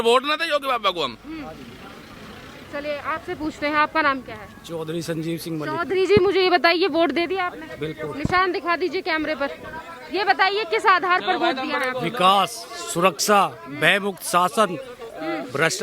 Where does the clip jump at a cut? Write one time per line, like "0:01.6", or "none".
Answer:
none